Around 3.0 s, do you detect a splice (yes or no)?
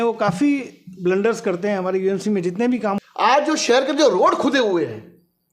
yes